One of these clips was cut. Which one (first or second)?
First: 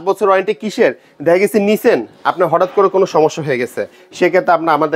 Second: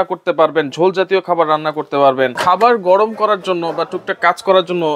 second